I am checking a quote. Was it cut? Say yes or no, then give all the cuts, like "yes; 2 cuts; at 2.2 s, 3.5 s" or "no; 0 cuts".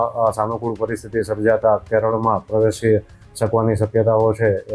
no; 0 cuts